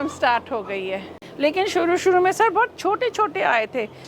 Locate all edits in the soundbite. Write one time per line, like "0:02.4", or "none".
0:01.2